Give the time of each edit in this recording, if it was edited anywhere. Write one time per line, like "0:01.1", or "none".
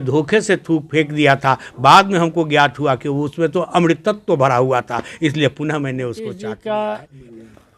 0:06.3